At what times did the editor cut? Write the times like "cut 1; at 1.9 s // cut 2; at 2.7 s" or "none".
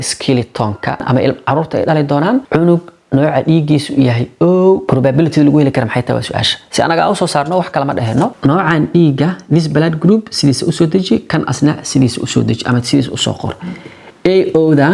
cut 1; at 1.0 s // cut 2; at 2.5 s // cut 3; at 4.8 s // cut 4; at 8.3 s